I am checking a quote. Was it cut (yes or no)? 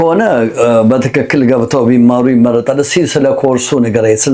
no